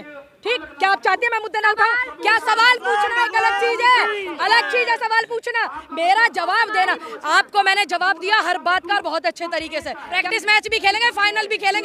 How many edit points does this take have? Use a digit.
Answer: 1